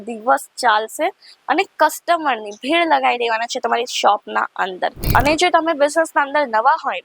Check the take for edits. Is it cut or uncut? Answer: cut